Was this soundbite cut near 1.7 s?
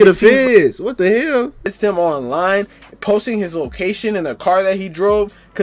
yes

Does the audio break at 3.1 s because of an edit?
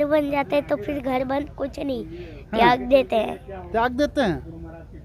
no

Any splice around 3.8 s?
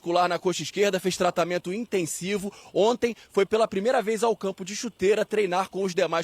no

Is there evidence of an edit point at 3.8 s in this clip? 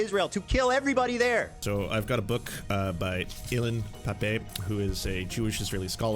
no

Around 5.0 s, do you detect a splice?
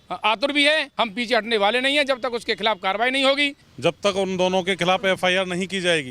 no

